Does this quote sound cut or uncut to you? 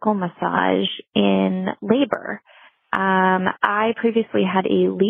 uncut